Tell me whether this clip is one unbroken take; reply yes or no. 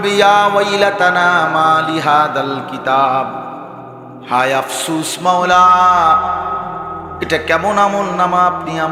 yes